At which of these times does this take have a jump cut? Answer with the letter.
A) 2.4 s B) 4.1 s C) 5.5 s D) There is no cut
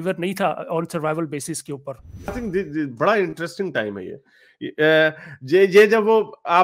A